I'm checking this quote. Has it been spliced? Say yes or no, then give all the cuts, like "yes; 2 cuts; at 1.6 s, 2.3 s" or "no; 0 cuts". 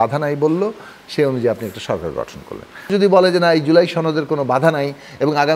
yes; 1 cut; at 2.9 s